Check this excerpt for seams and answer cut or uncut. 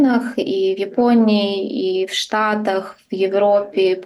uncut